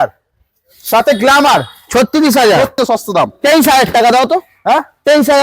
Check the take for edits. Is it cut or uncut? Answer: cut